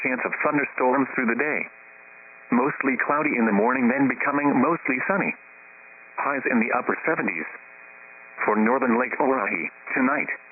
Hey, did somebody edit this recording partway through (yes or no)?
yes